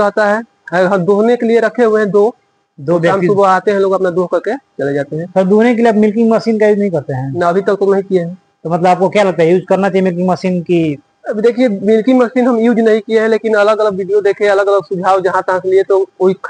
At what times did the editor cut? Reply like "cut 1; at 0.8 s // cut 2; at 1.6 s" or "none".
none

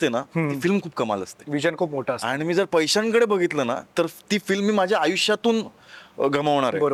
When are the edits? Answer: none

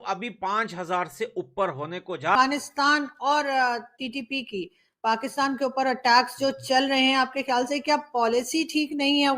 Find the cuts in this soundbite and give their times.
cut 1; at 2.4 s

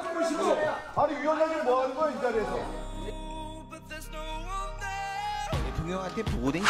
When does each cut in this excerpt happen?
cut 1; at 2.4 s

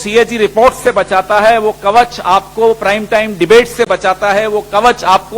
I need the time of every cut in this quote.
none

